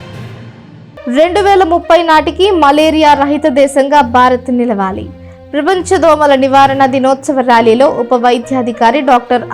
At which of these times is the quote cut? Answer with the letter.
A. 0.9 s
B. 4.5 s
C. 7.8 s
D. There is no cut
A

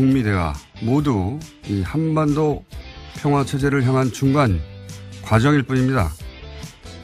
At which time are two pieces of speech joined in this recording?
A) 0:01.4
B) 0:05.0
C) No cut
C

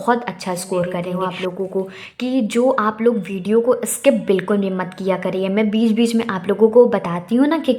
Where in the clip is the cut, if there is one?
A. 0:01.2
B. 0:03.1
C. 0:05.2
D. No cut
A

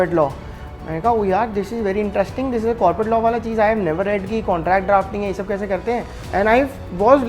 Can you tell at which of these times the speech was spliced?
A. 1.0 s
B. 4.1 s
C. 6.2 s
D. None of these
C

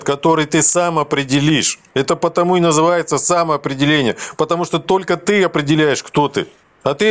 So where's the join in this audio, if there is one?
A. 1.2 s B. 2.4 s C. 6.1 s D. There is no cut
D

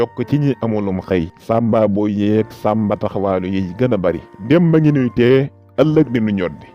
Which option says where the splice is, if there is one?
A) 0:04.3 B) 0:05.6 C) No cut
A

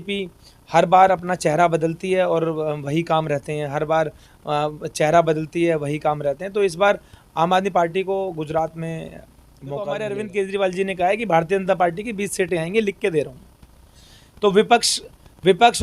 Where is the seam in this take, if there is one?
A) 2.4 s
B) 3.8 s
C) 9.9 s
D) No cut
C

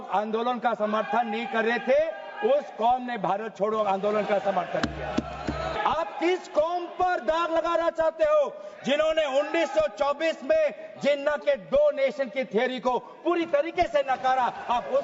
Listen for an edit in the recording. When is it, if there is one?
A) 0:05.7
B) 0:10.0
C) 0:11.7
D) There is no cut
A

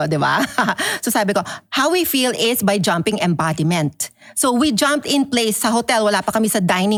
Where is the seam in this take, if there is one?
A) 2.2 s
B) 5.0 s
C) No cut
C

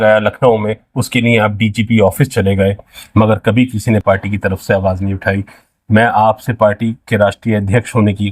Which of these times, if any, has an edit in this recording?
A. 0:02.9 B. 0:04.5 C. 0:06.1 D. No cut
A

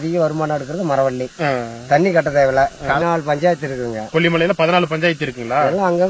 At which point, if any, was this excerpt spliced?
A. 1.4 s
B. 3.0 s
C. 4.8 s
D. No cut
B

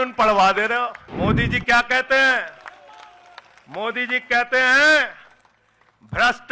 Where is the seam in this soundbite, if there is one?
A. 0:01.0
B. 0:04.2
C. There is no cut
A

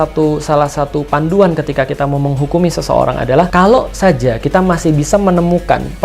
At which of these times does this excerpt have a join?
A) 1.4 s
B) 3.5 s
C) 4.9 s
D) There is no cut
B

